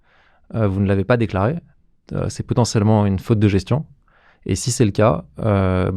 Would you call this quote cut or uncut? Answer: uncut